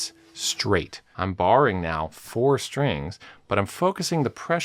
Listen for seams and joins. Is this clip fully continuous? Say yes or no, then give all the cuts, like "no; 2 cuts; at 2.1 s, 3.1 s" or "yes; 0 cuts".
no; 1 cut; at 1.0 s